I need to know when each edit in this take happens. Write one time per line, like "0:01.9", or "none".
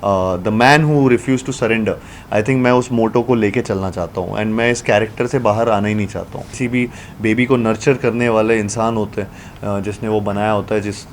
0:06.6